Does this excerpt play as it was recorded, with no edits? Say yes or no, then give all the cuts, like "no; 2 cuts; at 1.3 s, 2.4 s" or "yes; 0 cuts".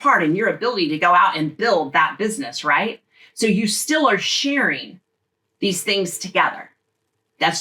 yes; 0 cuts